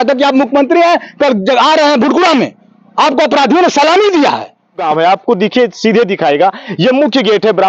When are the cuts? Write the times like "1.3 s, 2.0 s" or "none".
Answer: 4.8 s

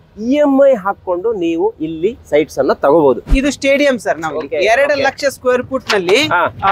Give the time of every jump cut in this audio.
3.3 s

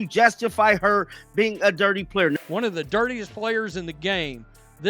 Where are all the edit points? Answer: 2.4 s

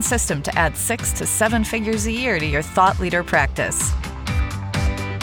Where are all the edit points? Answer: none

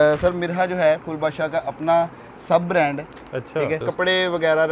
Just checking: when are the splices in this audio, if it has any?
3.8 s

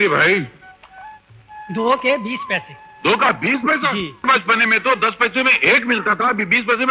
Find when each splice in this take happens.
none

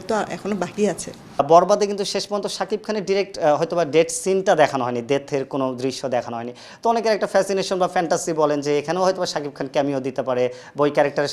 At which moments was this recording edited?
1.4 s

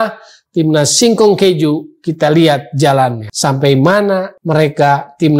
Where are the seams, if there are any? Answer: 3.3 s, 4.3 s

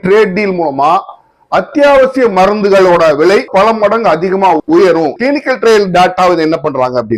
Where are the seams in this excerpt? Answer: 5.1 s

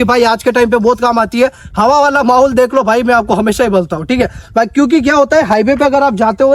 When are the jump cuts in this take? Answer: none

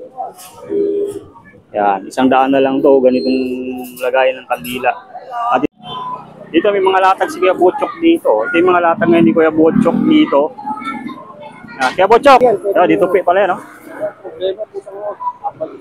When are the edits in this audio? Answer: 5.7 s, 12.4 s

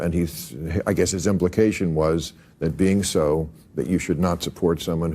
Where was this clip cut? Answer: 2.6 s

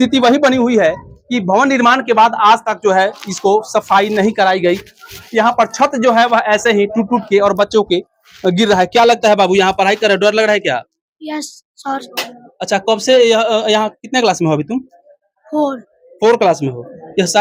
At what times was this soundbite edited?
none

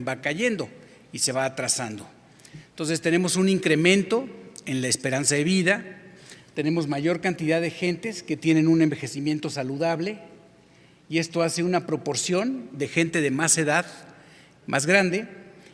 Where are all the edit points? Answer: 6.8 s

